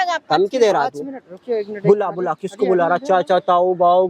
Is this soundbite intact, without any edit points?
yes; 0 cuts

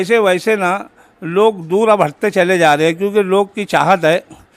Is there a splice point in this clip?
no; 0 cuts

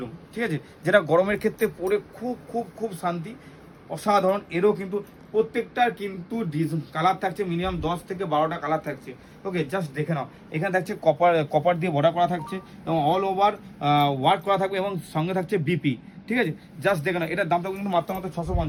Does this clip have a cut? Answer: no; 0 cuts

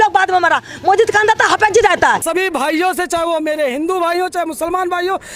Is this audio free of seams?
no; 1 cut; at 2.2 s

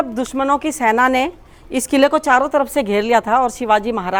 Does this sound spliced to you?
no; 0 cuts

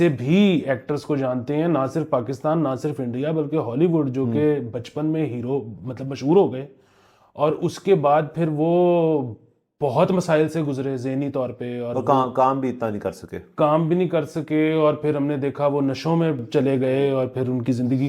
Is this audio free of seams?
yes; 0 cuts

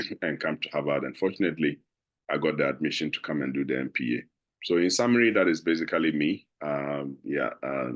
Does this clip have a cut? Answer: no; 0 cuts

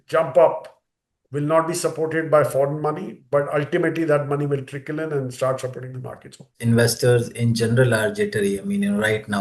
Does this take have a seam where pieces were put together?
yes; 1 cut; at 6.5 s

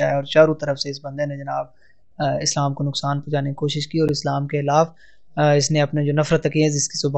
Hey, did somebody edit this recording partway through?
no; 0 cuts

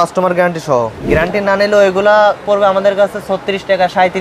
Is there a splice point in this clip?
yes; 1 cut; at 1.0 s

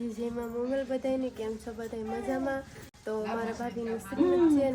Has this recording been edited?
no; 0 cuts

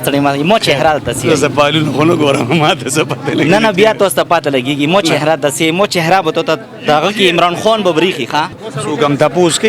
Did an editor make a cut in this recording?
yes; 1 cut; at 8.7 s

